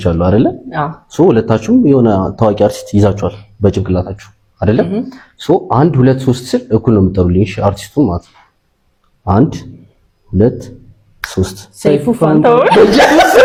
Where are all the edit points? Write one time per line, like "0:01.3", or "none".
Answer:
none